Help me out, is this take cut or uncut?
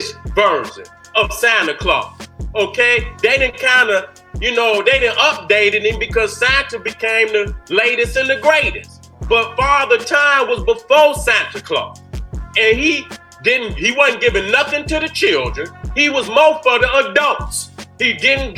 uncut